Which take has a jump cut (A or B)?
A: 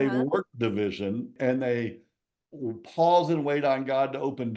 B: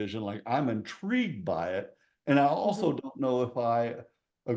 A